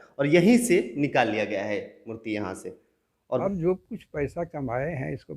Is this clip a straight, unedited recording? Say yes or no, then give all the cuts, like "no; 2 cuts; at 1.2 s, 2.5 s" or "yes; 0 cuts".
no; 1 cut; at 3.4 s